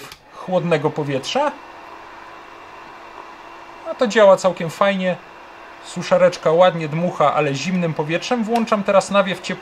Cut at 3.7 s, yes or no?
no